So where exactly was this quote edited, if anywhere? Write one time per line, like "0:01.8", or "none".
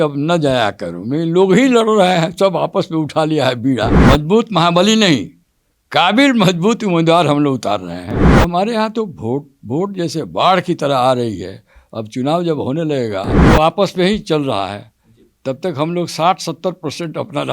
0:03.9
0:08.2
0:13.3